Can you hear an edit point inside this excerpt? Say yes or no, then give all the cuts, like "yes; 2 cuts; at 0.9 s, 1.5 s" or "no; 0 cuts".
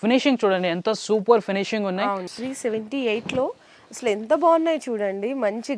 yes; 1 cut; at 2.2 s